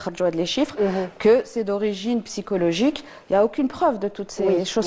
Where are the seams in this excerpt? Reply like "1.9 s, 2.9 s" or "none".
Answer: none